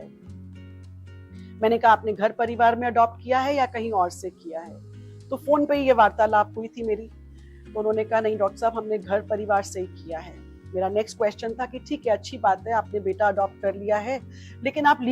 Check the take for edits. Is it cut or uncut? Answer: uncut